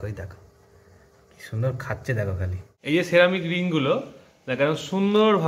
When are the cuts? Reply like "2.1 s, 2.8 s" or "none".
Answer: 2.7 s